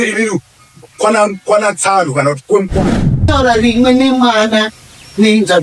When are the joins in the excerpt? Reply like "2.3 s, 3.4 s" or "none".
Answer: 3.3 s